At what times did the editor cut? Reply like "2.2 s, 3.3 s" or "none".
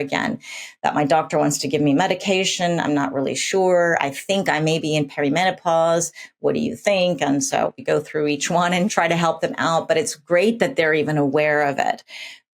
7.9 s, 8.9 s